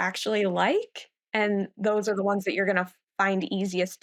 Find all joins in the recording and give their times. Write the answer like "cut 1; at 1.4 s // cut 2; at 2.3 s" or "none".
none